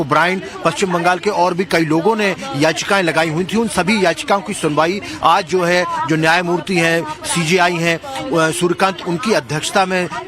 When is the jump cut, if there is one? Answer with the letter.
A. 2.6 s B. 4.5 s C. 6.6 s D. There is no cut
B